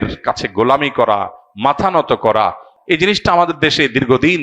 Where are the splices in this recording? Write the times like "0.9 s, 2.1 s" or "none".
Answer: 2.7 s